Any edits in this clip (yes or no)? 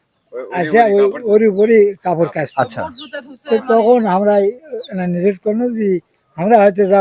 no